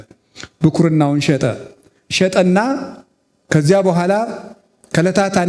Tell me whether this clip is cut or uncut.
uncut